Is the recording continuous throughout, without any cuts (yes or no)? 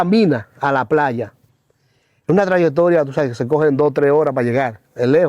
yes